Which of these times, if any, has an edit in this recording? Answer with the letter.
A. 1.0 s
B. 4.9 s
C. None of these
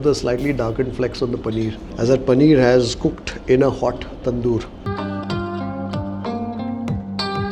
B